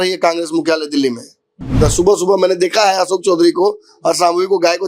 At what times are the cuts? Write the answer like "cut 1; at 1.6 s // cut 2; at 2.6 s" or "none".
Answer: cut 1; at 1.8 s